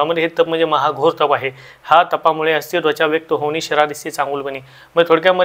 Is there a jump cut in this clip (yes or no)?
no